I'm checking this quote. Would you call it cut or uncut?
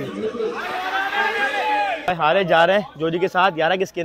cut